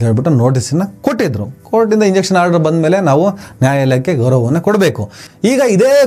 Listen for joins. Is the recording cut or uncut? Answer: uncut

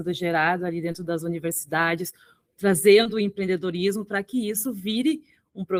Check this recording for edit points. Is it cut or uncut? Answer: uncut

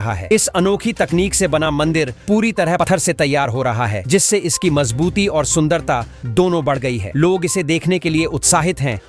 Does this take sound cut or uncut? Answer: uncut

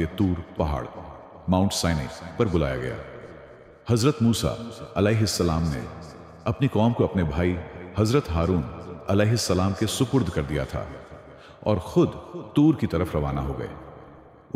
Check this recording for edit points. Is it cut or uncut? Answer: uncut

